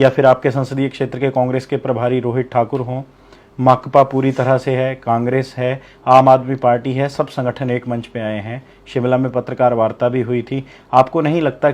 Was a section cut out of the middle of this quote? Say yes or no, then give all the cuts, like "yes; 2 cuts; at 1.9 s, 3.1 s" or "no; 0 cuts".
no; 0 cuts